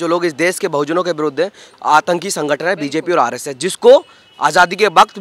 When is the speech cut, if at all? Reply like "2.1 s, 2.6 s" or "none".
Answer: 1.6 s

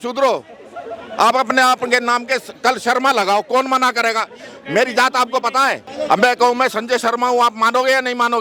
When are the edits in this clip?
5.9 s

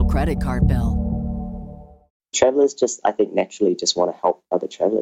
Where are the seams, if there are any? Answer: 2.3 s

